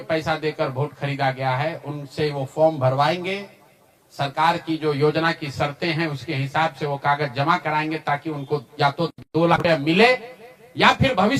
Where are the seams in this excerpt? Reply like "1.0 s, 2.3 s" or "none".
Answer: none